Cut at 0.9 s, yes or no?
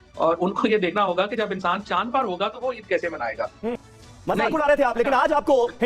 no